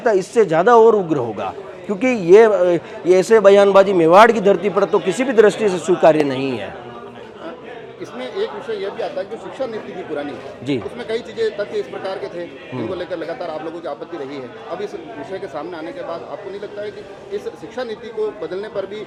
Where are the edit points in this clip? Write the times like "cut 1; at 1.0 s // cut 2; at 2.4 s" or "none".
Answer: none